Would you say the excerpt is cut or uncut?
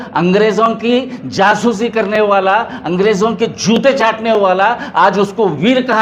uncut